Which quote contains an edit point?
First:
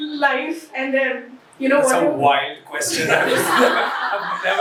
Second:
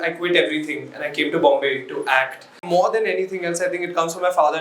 second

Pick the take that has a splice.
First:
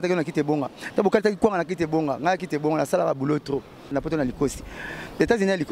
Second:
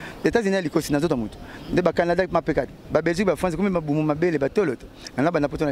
first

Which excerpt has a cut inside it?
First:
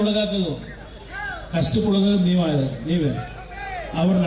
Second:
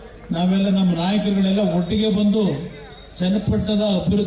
second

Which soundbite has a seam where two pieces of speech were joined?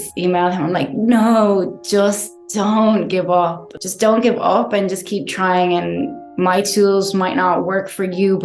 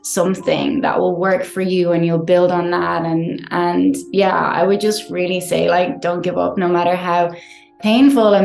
first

